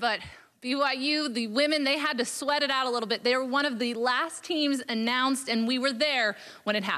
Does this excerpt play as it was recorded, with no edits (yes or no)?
yes